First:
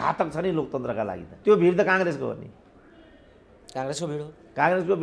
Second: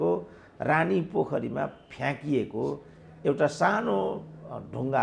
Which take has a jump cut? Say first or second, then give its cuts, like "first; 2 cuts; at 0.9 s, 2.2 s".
first; 1 cut; at 1.3 s